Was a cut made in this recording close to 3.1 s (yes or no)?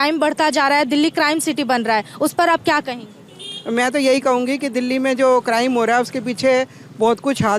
no